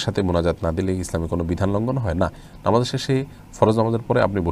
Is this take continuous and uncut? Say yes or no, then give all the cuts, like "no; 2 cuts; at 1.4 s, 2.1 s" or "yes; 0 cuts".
yes; 0 cuts